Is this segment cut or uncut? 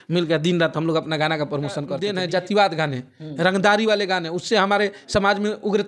cut